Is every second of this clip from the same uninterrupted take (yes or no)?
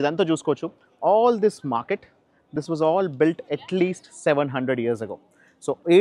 yes